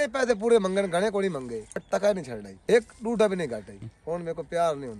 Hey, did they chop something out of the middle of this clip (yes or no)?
yes